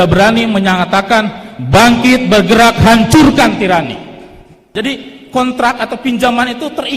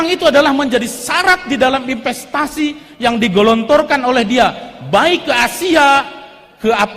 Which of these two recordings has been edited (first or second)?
first